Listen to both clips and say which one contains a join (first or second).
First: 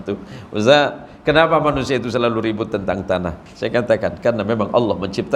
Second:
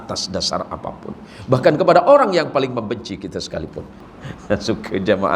second